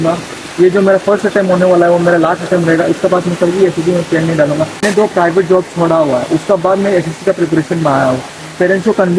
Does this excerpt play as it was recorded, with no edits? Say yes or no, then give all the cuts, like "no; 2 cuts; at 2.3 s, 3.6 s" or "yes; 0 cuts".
yes; 0 cuts